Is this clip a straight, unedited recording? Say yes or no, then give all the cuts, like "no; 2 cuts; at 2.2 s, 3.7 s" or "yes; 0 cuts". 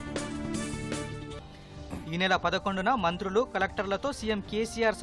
no; 1 cut; at 1.2 s